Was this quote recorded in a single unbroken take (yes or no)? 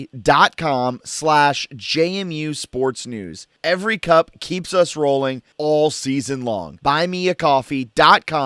yes